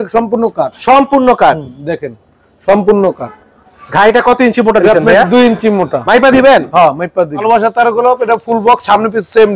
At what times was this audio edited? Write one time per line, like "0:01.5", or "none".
0:07.4